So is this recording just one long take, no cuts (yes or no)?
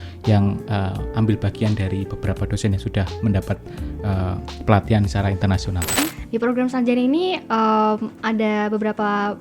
no